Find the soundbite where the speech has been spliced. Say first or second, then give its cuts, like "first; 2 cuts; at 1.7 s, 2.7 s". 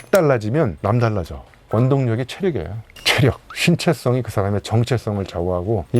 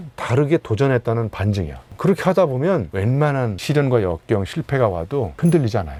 first; 1 cut; at 1.6 s